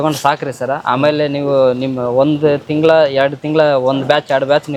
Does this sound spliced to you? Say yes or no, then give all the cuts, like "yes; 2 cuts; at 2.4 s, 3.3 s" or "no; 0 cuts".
no; 0 cuts